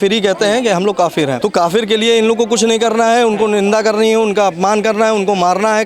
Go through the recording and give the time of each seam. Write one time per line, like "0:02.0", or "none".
0:01.4